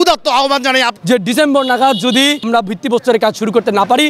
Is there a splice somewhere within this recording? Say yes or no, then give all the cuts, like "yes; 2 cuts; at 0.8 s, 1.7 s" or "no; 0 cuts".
yes; 2 cuts; at 0.9 s, 2.4 s